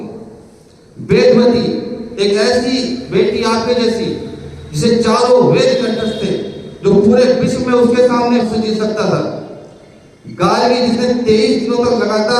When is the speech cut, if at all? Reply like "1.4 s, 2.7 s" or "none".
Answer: 8.5 s